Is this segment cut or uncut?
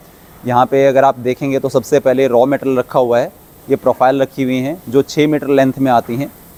uncut